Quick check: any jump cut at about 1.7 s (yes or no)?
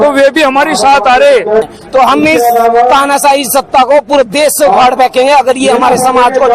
yes